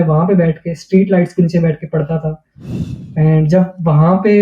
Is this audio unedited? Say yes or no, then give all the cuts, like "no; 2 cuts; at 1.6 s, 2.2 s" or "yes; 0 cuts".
yes; 0 cuts